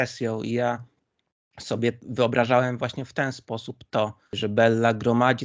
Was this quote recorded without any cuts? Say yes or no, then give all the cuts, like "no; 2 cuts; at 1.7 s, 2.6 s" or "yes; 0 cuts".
no; 2 cuts; at 2.0 s, 4.3 s